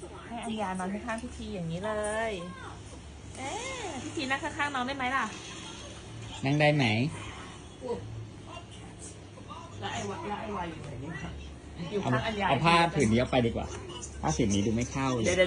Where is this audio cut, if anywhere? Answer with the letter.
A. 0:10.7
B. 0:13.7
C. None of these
C